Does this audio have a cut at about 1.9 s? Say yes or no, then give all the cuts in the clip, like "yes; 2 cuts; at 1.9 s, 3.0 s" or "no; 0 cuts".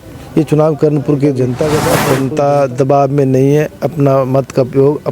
yes; 1 cut; at 1.9 s